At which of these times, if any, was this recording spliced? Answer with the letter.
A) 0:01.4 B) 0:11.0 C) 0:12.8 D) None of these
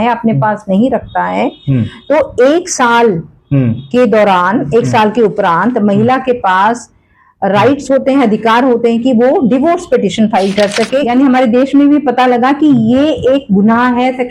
B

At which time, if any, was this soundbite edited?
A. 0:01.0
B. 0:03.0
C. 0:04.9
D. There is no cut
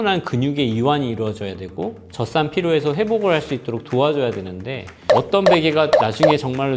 C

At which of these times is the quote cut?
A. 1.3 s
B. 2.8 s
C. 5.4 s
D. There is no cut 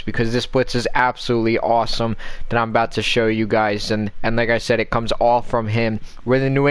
C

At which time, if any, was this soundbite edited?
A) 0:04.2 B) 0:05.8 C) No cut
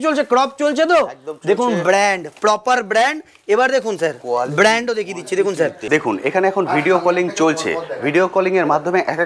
B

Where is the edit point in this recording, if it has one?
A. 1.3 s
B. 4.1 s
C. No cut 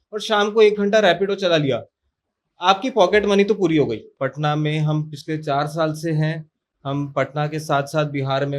B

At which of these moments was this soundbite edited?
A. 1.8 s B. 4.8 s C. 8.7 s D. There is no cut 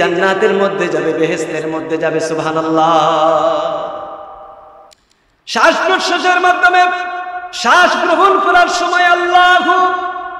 B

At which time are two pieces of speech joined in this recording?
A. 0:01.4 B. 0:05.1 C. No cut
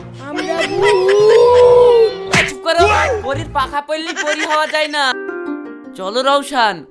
B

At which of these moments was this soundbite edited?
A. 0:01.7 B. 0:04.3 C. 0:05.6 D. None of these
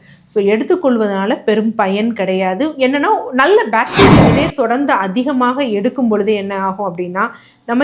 B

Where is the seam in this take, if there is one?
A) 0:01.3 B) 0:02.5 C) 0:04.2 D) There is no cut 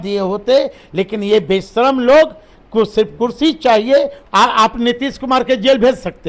C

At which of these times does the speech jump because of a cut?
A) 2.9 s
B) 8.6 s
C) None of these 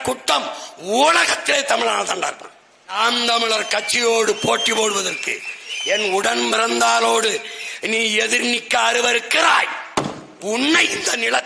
A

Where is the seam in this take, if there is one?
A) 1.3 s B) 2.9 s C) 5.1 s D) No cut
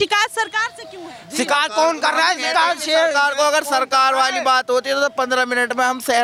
D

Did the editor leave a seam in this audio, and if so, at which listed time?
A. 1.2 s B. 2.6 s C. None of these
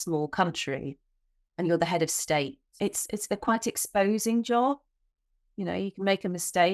B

